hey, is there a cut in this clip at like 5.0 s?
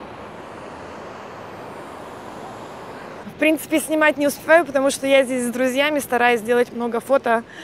no; 1 cut; at 3.2 s

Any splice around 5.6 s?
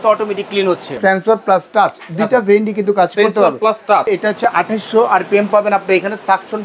no; 2 cuts; at 1.0 s, 4.1 s

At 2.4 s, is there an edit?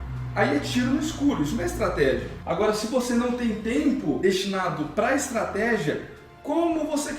yes; 2 cuts; at 2.4 s, 4.2 s

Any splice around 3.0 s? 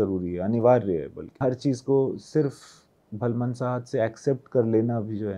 no; 1 cut; at 1.4 s

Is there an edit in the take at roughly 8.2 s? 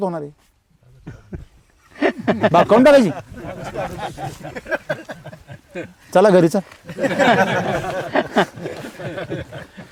no; 0 cuts

